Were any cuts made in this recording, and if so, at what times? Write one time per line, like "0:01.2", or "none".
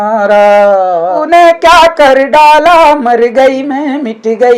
0:01.2